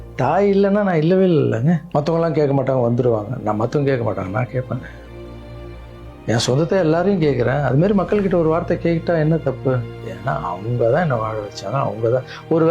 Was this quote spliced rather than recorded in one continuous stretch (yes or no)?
yes